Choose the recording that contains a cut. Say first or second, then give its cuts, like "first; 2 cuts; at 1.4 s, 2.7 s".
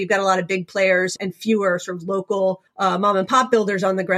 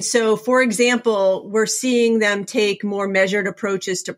first; 2 cuts; at 1.1 s, 2.7 s